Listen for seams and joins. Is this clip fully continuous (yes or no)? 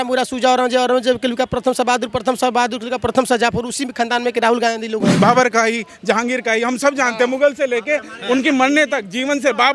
no